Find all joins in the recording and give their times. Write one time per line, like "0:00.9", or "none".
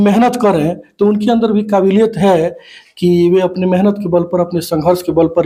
none